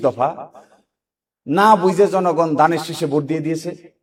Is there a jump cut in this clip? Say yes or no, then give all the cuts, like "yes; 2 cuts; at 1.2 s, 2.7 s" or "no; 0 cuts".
no; 0 cuts